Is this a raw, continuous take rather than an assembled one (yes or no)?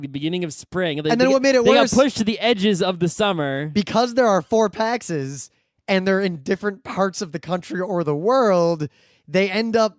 no